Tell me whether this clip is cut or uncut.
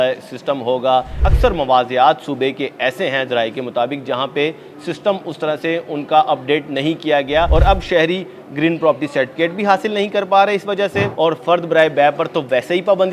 cut